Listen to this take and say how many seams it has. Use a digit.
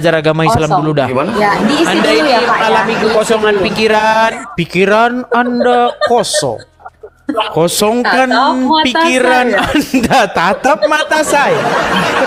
0